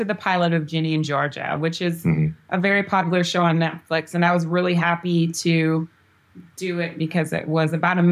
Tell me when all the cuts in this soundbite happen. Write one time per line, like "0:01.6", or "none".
none